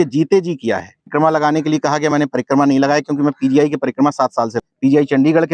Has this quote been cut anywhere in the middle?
yes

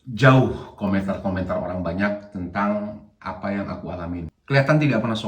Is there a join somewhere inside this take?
yes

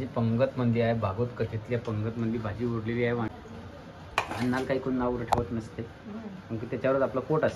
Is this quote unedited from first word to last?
no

